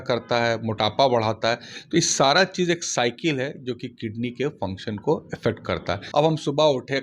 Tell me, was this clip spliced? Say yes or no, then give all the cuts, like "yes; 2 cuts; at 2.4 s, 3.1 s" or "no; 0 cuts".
yes; 1 cut; at 5.9 s